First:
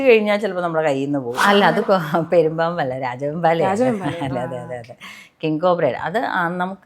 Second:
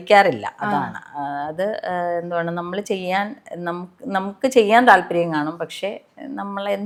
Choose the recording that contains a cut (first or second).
first